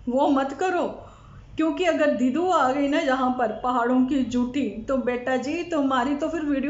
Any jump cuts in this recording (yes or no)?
no